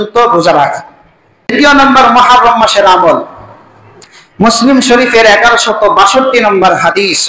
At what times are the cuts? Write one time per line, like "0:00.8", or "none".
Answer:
0:01.5